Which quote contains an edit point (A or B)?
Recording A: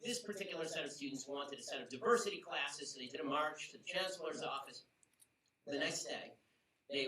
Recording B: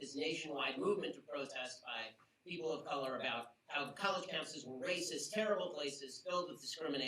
A